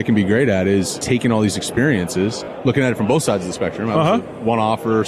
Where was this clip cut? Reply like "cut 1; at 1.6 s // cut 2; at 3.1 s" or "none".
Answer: cut 1; at 1.0 s // cut 2; at 2.5 s